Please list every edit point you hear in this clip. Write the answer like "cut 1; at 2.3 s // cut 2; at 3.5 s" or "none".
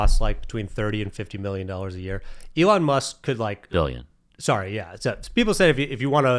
none